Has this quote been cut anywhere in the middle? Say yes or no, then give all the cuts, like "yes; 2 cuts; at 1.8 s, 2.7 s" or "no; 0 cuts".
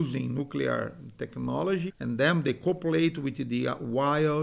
yes; 1 cut; at 1.9 s